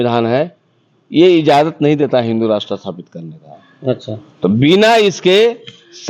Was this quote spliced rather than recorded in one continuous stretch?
no; 0 cuts

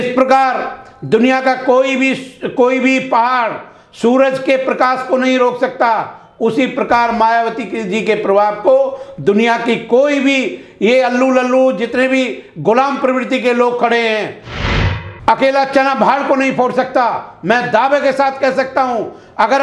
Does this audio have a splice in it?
yes; 1 cut; at 14.8 s

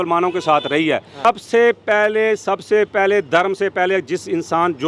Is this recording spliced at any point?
yes; 1 cut; at 1.2 s

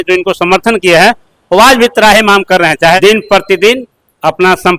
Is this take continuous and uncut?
no; 1 cut; at 3.0 s

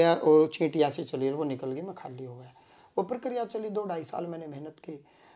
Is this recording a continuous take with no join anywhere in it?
yes; 0 cuts

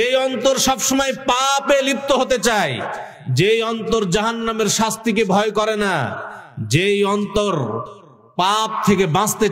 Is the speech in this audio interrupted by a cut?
no; 0 cuts

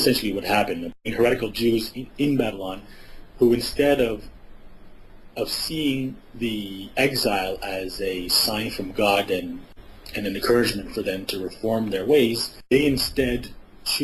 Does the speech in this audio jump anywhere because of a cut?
no; 0 cuts

